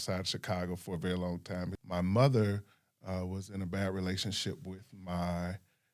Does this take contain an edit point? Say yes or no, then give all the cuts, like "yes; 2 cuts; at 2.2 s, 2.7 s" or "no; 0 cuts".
yes; 1 cut; at 1.8 s